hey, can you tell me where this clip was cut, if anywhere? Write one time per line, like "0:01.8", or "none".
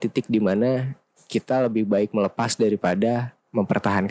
none